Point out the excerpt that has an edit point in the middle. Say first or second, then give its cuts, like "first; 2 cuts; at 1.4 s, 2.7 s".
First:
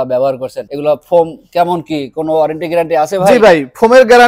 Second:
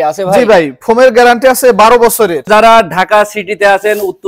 second; 1 cut; at 2.5 s